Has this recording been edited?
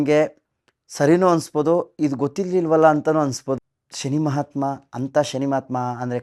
yes; 1 cut; at 3.6 s

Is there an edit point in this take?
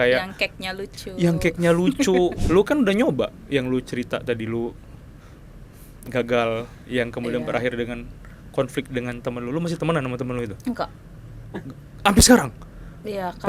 yes; 1 cut; at 2.4 s

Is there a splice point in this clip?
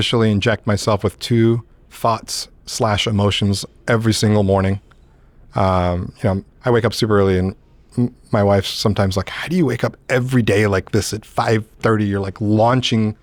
no; 0 cuts

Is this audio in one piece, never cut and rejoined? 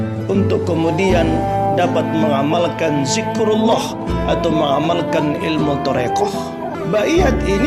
no; 1 cut; at 6.8 s

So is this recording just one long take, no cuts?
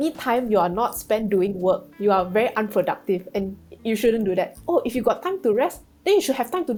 yes; 0 cuts

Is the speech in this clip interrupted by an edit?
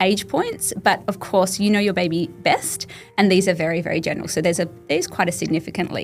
no; 0 cuts

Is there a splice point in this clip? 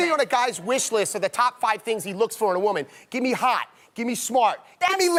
no; 0 cuts

